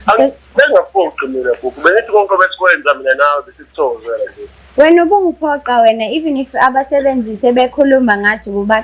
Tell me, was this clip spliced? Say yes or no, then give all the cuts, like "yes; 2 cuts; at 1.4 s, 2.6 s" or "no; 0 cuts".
no; 0 cuts